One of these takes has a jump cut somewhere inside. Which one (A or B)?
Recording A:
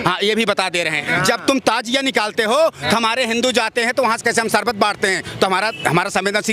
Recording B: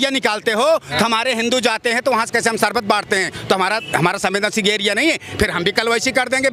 A